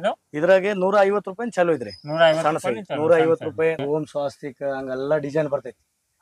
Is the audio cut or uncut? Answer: cut